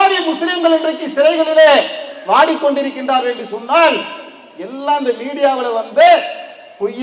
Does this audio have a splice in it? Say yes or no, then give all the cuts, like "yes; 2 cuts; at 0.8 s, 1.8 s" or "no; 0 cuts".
no; 0 cuts